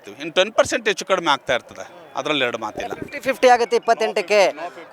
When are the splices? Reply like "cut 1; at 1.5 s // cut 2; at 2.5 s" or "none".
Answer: none